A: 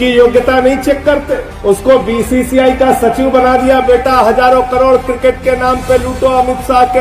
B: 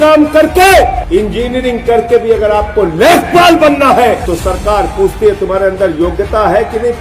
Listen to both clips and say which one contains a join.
B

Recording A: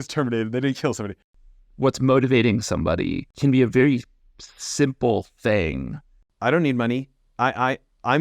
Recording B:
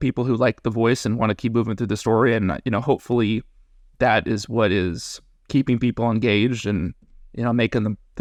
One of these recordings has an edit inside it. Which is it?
A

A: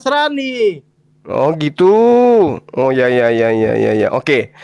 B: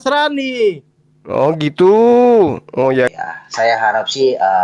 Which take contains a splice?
B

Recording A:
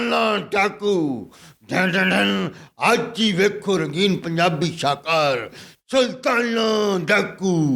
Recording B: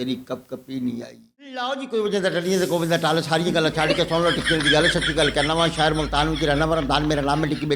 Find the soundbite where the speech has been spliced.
B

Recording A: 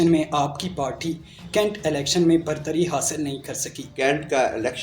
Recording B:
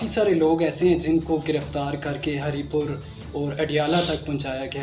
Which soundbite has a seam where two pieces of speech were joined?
A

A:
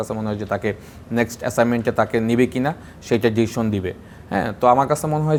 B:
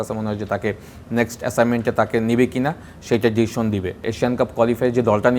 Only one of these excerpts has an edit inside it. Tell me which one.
B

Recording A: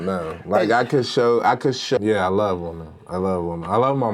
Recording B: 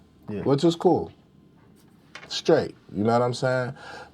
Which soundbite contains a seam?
A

